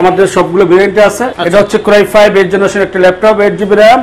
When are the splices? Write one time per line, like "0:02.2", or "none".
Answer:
0:01.3